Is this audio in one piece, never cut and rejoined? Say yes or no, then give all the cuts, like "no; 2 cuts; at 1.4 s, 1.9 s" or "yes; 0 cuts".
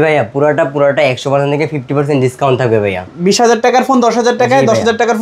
yes; 0 cuts